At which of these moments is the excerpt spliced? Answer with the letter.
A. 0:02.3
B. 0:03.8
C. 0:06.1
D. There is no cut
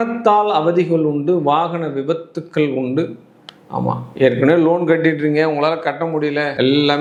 D